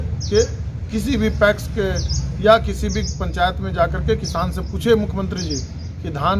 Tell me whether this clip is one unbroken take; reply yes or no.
yes